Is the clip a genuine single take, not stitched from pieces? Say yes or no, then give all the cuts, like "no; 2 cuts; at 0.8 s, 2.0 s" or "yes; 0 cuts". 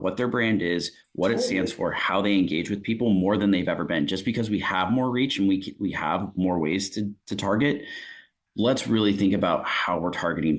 yes; 0 cuts